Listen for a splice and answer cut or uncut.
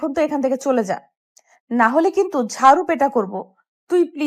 uncut